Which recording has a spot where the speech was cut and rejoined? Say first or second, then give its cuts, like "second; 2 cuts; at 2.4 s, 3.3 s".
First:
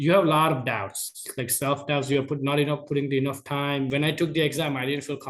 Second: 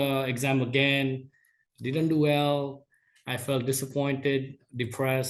first; 1 cut; at 3.9 s